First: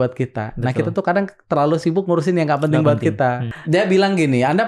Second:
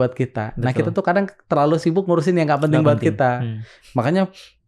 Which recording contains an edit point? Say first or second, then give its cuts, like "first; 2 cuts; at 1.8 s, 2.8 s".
first; 1 cut; at 3.5 s